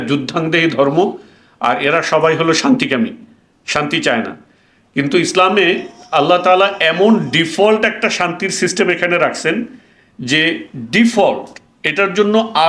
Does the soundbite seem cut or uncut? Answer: uncut